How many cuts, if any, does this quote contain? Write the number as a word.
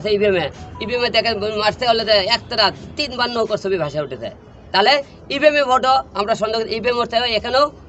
zero